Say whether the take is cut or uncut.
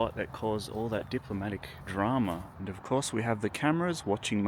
cut